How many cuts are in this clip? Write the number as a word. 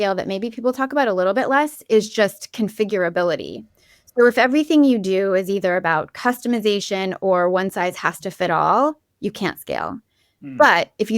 zero